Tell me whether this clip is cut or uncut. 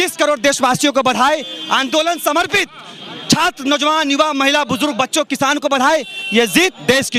uncut